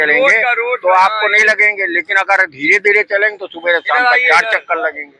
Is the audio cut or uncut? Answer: uncut